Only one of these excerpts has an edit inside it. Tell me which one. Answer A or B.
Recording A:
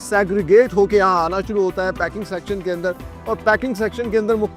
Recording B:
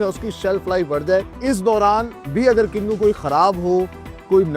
B